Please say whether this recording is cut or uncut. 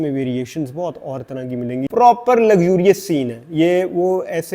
cut